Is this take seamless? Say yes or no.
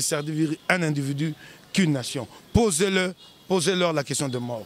yes